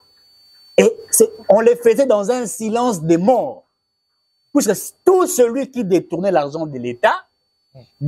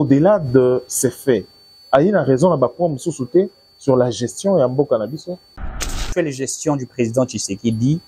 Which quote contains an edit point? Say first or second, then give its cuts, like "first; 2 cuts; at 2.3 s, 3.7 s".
second; 1 cut; at 5.9 s